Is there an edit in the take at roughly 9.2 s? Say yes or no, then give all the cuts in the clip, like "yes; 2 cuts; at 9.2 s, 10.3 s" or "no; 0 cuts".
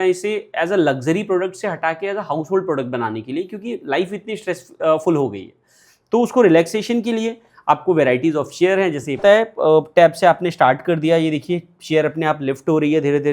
yes; 1 cut; at 9.2 s